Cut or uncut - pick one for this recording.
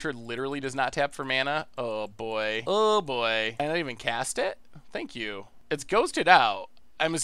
cut